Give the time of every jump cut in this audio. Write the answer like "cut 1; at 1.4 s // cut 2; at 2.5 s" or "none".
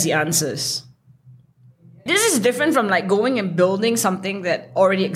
cut 1; at 2.0 s